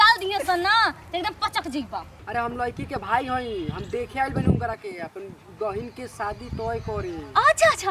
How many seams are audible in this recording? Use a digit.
1